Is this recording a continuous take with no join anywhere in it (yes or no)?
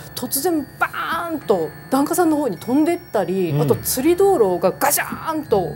no